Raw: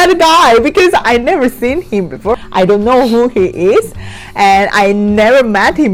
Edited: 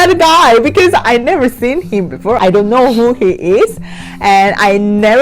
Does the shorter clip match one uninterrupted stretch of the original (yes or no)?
no